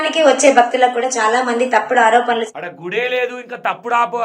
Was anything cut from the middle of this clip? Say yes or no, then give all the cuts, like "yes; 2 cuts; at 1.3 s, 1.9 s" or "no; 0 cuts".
yes; 1 cut; at 2.6 s